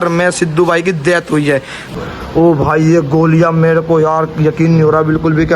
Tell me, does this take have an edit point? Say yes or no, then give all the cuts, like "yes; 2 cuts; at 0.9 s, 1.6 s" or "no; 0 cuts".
yes; 1 cut; at 1.9 s